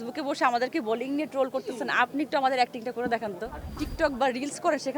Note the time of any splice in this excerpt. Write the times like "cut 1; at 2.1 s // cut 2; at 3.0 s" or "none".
cut 1; at 3.8 s